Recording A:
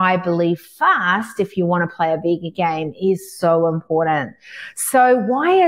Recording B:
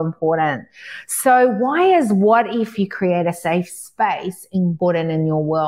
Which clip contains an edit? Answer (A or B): B